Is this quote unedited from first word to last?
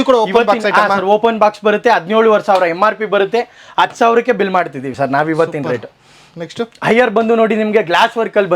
yes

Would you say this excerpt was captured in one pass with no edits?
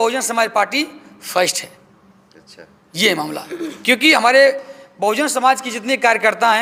yes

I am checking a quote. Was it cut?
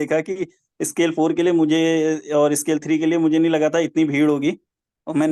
no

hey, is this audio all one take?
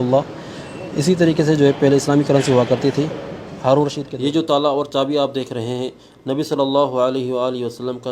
no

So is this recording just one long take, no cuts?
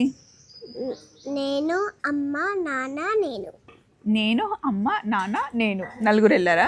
yes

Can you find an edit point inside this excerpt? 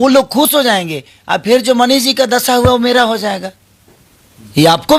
no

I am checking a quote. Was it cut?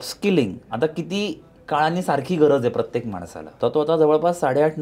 yes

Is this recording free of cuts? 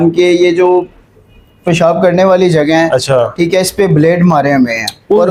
yes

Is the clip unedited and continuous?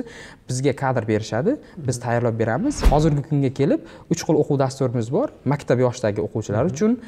no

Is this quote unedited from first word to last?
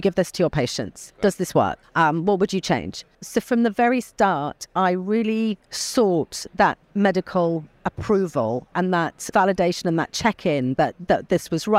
no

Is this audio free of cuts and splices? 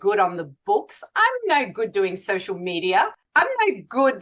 no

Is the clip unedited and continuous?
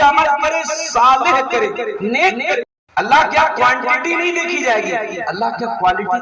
no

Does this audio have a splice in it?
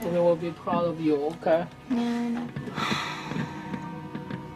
yes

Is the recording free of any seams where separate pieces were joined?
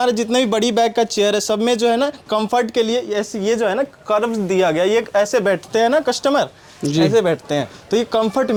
yes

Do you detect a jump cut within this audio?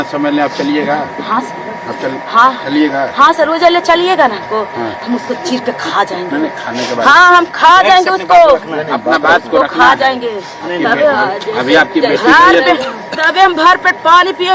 no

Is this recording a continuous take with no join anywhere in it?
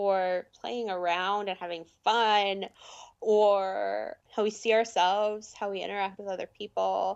no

